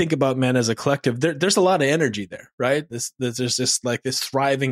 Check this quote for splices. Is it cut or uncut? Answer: uncut